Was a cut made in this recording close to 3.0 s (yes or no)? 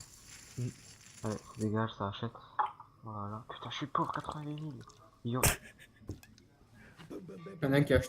yes